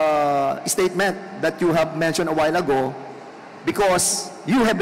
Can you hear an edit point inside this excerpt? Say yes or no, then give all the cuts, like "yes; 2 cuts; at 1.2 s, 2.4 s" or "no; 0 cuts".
no; 0 cuts